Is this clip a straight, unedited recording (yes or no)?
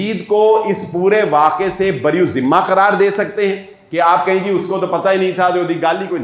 yes